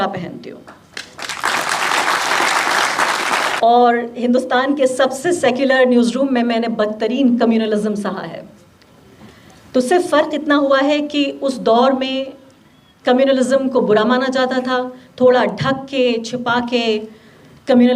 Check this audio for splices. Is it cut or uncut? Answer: cut